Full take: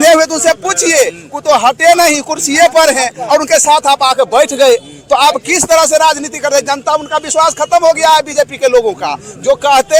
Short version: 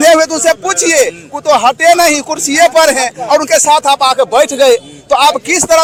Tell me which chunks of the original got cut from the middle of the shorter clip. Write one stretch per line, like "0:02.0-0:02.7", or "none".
none